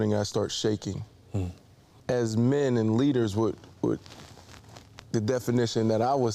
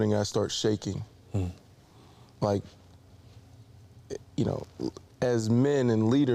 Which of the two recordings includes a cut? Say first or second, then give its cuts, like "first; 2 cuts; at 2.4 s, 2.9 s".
first; 1 cut; at 1.9 s